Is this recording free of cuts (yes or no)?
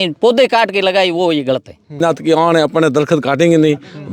no